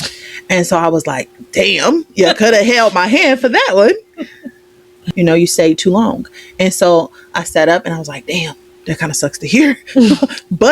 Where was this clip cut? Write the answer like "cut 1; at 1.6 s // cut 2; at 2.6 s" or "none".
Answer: cut 1; at 5.0 s